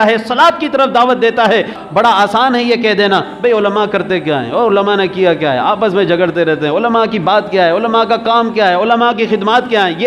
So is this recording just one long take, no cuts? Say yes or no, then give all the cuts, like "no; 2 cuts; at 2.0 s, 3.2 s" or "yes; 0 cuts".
no; 1 cut; at 1.8 s